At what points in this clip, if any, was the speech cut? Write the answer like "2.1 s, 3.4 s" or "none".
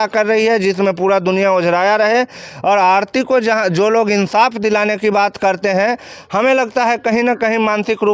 none